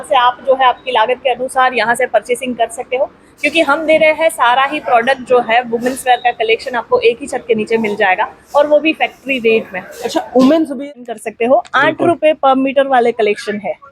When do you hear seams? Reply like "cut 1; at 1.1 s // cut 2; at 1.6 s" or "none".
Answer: cut 1; at 10.8 s